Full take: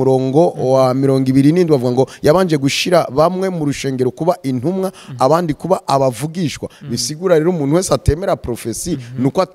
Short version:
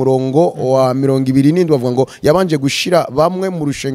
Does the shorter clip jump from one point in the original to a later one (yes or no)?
no